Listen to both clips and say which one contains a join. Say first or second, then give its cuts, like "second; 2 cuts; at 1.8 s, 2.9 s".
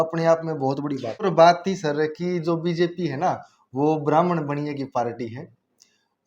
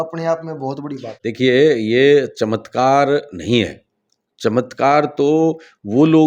first; 1 cut; at 1.1 s